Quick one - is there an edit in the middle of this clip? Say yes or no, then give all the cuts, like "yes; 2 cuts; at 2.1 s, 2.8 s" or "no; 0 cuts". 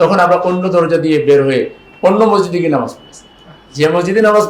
no; 0 cuts